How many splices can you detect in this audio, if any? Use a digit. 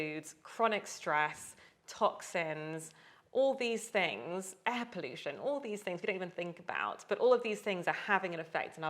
0